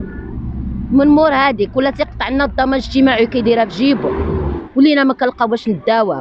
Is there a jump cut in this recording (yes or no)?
yes